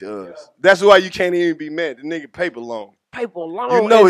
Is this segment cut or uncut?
uncut